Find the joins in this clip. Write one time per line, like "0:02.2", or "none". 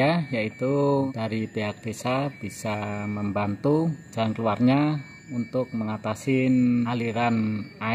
0:01.1
0:04.1
0:06.9